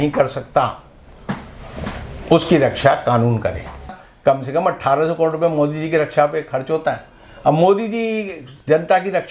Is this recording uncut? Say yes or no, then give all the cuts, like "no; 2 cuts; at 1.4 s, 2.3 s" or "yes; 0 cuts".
no; 1 cut; at 4.0 s